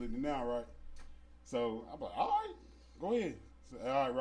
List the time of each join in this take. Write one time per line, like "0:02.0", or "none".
none

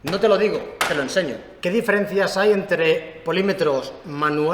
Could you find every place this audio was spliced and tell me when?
0:01.5

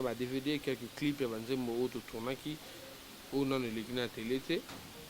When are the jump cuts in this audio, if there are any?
none

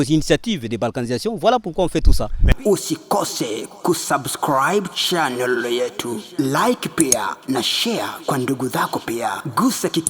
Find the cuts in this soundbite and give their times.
0:02.4

